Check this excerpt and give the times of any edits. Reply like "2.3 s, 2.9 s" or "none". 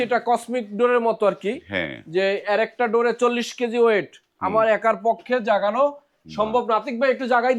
none